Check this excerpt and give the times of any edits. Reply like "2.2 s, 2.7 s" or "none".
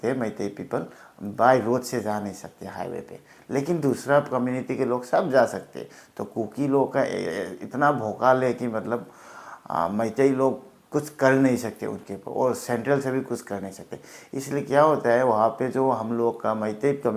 none